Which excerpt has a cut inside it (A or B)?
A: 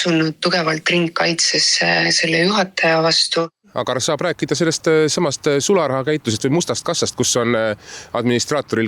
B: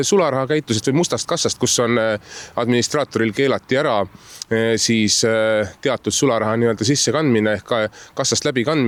A